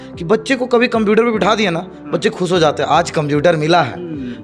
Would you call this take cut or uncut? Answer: uncut